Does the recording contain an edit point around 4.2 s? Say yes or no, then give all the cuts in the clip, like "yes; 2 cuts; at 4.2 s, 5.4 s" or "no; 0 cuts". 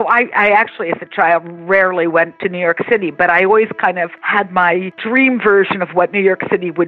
yes; 3 cuts; at 2.3 s, 4.2 s, 5.0 s